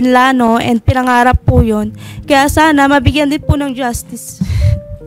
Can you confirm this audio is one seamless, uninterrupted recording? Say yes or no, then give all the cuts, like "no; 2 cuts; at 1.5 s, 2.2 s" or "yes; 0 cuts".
yes; 0 cuts